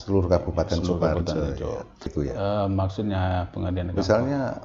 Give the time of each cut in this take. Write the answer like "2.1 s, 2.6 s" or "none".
2.1 s